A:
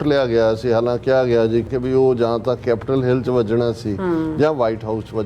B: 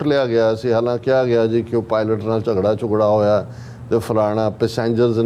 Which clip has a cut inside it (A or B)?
A